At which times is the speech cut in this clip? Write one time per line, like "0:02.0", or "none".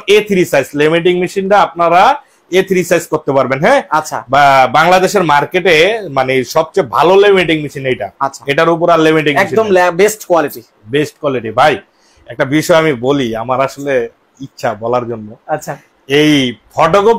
none